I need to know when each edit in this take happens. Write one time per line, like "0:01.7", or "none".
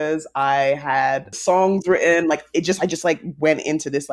0:01.3